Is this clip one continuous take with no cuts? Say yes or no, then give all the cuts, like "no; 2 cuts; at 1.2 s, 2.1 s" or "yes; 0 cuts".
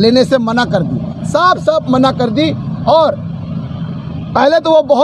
yes; 0 cuts